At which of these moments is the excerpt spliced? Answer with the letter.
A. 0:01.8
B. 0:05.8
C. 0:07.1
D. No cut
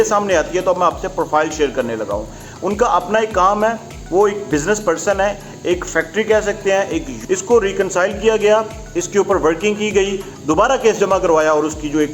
C